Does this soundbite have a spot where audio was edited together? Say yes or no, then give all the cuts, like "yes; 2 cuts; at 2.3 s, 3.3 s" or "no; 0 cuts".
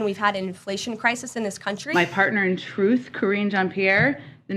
yes; 1 cut; at 1.7 s